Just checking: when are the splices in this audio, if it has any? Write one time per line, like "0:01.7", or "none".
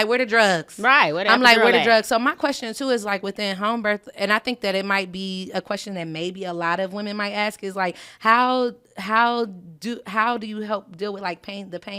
none

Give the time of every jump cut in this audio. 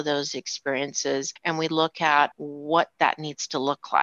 0:01.3
0:02.5

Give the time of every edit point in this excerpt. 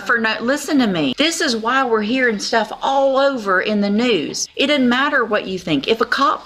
0:01.1
0:04.4

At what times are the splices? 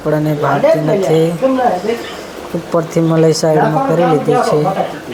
none

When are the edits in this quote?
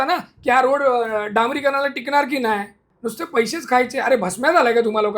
0:02.9

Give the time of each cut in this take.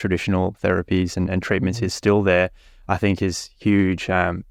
none

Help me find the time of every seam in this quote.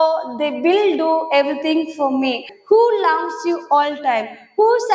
0:02.5

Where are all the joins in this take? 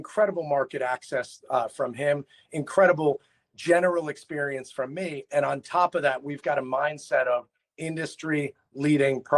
none

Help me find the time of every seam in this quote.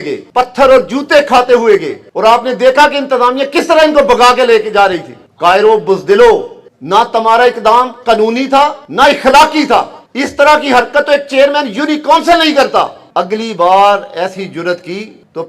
0:08.8
0:13.0

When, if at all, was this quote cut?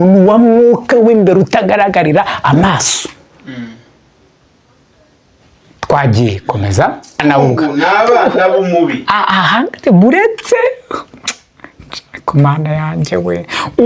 0:07.2

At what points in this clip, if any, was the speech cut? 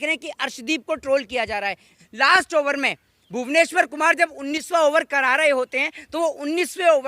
0:01.9

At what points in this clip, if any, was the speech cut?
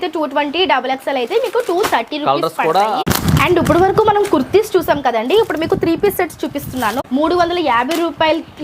0:03.0
0:07.0

